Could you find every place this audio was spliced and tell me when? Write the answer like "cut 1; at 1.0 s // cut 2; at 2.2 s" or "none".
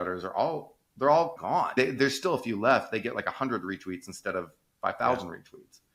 none